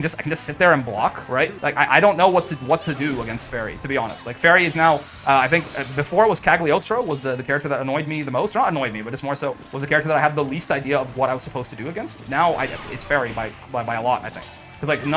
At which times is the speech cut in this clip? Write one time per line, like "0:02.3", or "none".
0:01.6